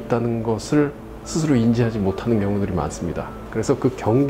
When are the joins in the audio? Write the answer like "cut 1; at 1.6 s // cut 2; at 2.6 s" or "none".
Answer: cut 1; at 3.4 s